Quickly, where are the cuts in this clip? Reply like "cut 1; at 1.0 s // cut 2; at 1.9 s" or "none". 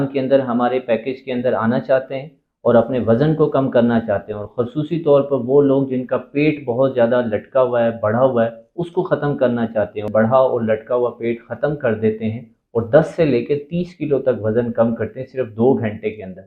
cut 1; at 10.1 s

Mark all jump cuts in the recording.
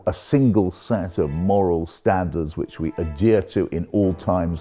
none

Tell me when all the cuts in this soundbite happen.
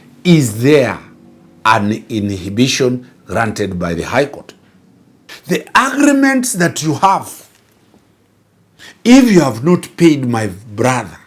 cut 1; at 5.3 s

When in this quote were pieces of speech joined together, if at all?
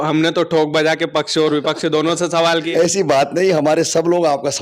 none

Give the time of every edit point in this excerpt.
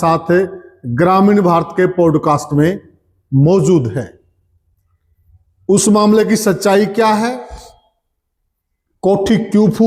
none

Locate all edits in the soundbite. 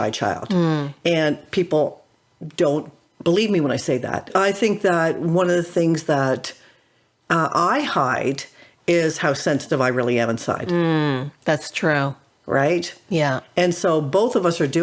cut 1; at 4.3 s

